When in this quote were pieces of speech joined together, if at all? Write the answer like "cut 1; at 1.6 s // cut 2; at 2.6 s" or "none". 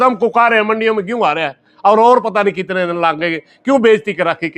none